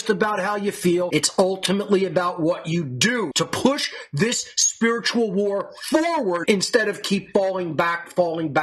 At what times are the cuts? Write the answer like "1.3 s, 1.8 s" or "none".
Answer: none